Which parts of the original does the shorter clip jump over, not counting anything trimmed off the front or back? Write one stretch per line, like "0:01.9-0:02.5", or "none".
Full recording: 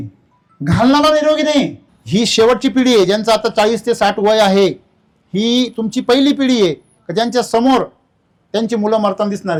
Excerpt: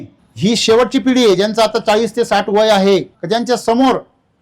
0:04.8-0:07.0